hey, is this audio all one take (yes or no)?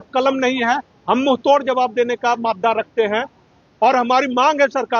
yes